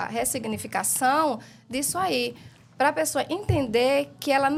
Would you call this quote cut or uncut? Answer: uncut